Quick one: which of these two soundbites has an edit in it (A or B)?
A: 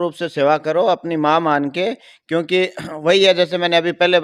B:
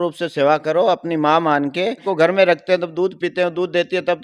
B